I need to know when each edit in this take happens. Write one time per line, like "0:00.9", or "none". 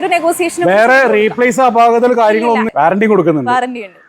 0:02.7